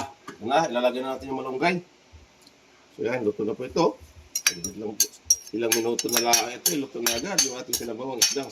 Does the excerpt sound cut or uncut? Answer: uncut